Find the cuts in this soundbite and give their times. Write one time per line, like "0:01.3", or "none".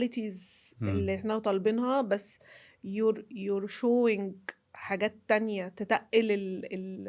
none